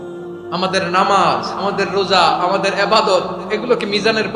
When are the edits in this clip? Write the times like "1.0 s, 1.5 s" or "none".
none